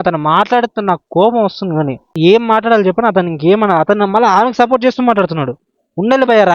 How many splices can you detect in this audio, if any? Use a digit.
1